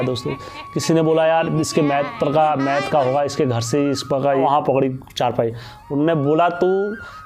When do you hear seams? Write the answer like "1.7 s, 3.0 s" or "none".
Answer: 4.4 s